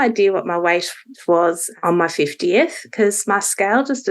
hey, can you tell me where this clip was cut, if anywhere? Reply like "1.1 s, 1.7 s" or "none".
1.2 s